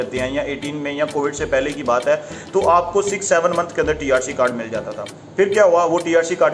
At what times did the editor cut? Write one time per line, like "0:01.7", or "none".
none